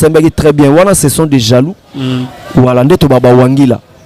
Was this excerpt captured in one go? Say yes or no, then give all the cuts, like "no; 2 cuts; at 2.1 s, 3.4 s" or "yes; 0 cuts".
yes; 0 cuts